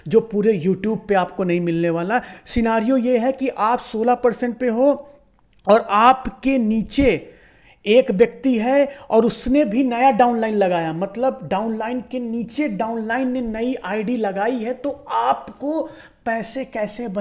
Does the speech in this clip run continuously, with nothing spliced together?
yes; 0 cuts

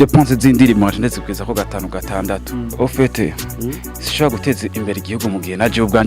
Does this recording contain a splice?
yes; 1 cut; at 2.8 s

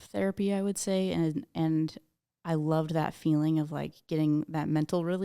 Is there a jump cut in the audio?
no; 0 cuts

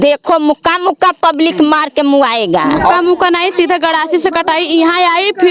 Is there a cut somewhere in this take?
yes; 1 cut; at 3.0 s

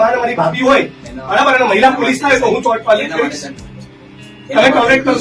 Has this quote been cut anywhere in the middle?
no; 0 cuts

